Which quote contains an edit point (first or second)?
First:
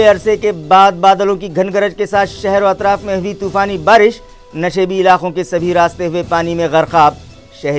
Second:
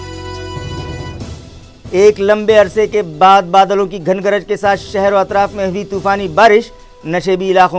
second